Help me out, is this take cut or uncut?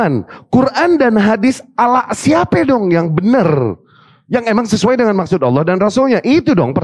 uncut